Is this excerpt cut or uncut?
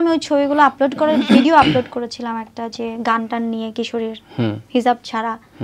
uncut